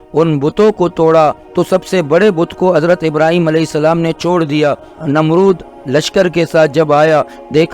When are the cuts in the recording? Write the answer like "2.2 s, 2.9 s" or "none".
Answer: 1.5 s, 4.9 s